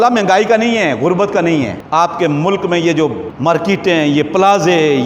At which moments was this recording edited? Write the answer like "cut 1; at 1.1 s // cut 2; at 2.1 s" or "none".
cut 1; at 1.8 s // cut 2; at 3.3 s